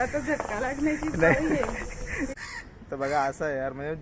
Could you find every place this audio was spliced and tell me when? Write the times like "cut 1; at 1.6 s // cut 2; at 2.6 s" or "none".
cut 1; at 2.3 s